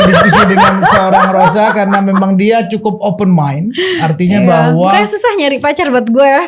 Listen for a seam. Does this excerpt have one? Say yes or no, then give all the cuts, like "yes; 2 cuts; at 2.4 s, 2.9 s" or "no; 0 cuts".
no; 0 cuts